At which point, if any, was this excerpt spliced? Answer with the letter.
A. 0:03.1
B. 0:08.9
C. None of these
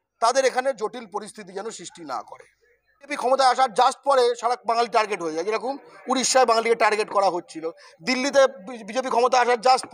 A